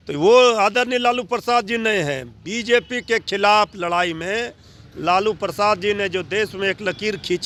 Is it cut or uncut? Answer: uncut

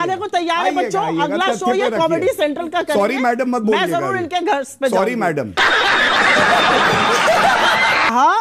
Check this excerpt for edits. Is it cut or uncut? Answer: uncut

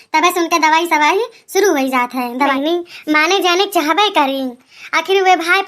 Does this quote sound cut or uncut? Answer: cut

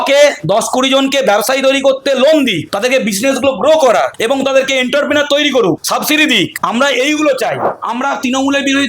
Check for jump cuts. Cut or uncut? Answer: cut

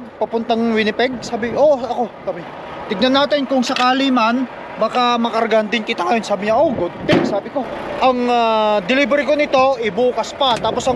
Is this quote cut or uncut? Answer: cut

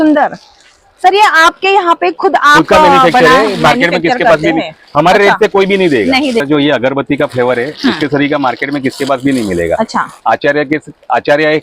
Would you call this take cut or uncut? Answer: cut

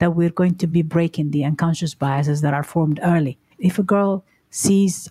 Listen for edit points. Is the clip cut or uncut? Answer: cut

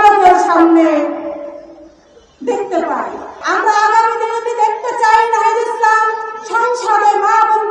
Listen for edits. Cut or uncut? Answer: cut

